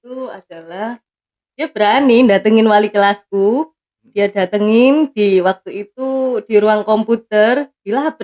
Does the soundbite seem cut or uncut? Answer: uncut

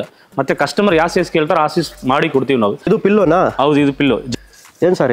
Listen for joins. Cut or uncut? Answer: cut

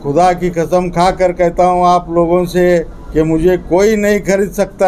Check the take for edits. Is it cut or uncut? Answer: uncut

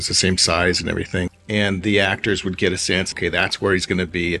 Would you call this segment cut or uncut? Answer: cut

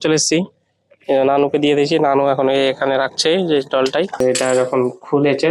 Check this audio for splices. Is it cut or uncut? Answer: cut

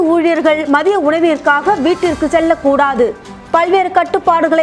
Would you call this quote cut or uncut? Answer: uncut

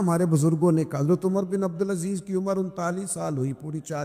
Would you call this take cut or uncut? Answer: uncut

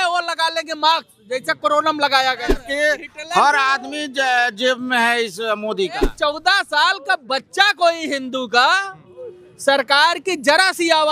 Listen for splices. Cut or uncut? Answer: cut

